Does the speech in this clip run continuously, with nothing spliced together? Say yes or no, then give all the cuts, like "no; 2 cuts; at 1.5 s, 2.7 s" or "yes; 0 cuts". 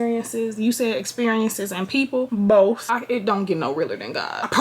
no; 1 cut; at 2.8 s